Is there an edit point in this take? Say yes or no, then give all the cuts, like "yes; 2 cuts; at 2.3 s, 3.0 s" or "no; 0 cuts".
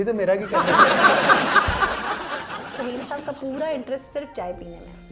yes; 1 cut; at 2.3 s